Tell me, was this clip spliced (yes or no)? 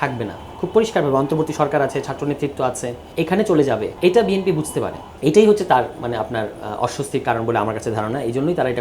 yes